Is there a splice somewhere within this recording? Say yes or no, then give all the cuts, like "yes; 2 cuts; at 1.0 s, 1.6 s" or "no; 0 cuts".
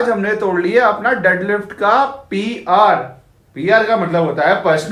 no; 0 cuts